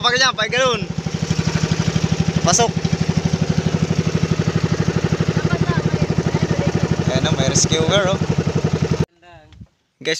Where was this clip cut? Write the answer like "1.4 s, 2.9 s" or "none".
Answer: 9.1 s